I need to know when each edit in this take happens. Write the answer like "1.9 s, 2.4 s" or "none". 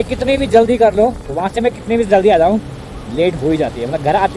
none